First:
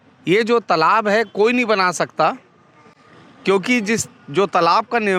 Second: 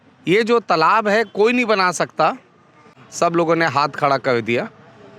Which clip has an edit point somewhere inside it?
second; 1 cut; at 3.0 s

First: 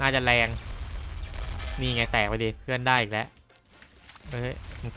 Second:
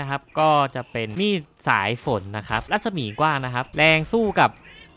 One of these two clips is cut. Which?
second; 3 cuts; at 1.1 s, 2.6 s, 3.7 s

